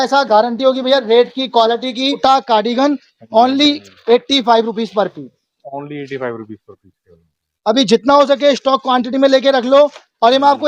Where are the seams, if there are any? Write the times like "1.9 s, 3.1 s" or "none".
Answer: 2.2 s